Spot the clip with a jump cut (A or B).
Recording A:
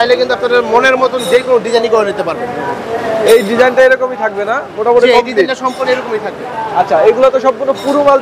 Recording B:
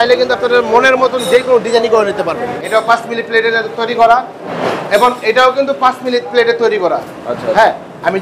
B